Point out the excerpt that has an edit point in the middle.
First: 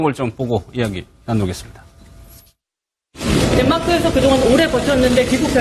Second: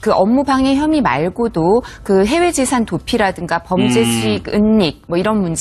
second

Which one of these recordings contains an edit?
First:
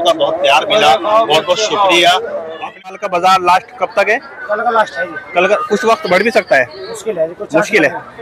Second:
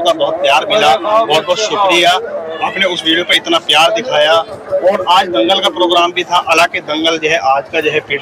first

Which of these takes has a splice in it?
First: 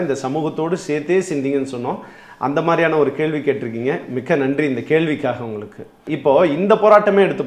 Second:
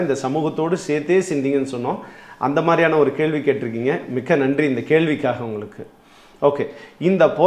first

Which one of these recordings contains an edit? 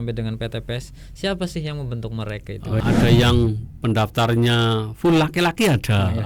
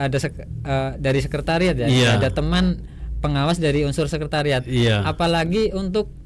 first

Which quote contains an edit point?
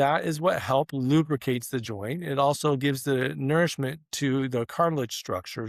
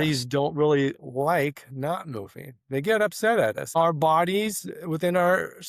second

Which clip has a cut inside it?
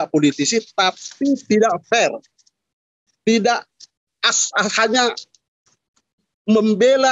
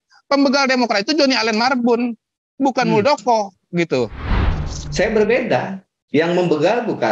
second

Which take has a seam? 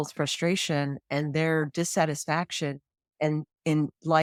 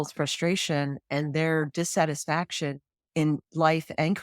second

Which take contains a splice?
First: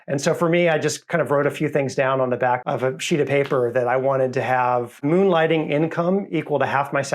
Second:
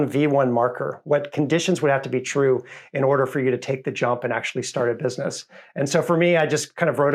first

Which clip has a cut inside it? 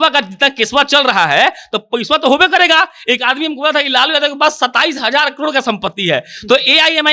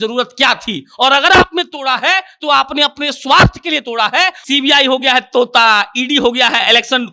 second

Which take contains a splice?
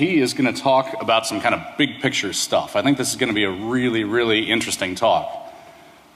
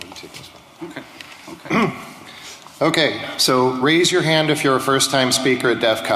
second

